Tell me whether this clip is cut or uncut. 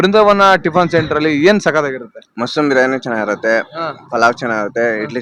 uncut